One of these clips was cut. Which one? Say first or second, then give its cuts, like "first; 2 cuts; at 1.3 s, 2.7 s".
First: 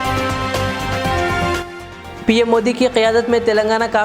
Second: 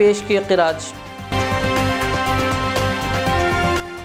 first; 1 cut; at 1.5 s